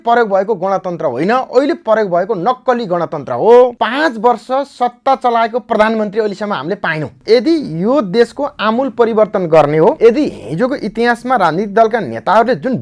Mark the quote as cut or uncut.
cut